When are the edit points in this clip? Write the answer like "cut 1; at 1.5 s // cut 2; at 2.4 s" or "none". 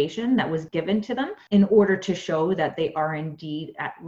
cut 1; at 1.3 s